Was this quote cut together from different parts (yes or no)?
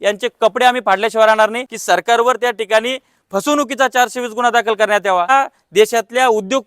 yes